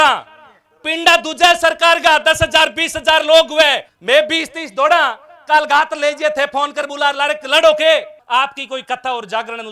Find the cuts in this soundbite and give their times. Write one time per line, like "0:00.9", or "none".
0:03.9
0:08.2